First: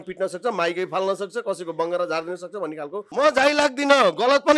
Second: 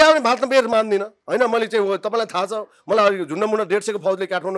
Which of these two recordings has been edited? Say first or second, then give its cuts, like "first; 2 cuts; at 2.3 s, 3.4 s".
first; 1 cut; at 3.1 s